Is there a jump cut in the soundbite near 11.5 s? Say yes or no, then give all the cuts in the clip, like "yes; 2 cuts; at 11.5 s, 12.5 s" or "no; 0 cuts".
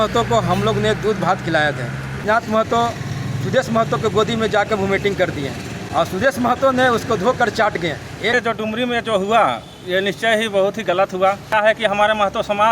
yes; 3 cuts; at 2.2 s, 8.3 s, 11.5 s